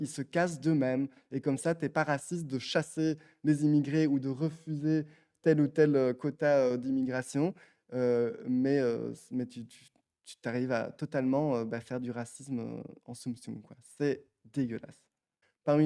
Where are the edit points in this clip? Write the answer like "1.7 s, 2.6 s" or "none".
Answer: 14.9 s